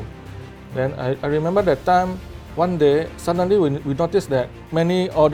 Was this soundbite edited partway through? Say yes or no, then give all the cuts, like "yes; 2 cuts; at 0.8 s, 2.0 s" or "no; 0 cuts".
no; 0 cuts